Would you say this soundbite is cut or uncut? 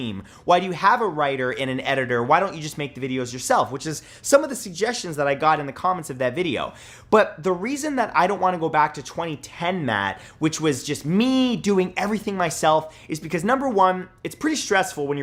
uncut